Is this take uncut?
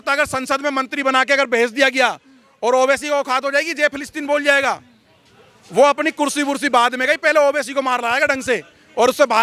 yes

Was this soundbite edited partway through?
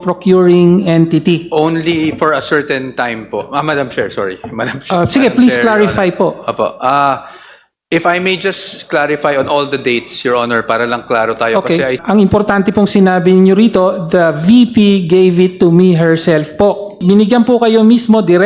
yes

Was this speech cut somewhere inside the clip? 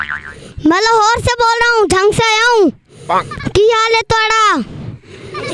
no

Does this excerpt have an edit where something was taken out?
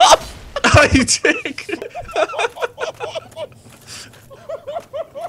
no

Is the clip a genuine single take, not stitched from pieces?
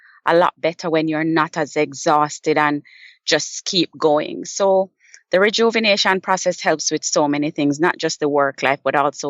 yes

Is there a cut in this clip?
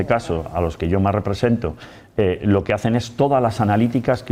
no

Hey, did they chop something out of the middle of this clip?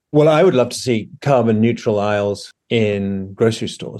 yes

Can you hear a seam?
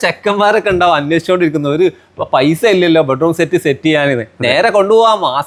no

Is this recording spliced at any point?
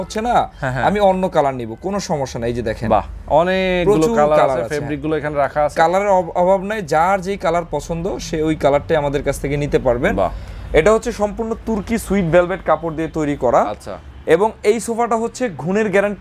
no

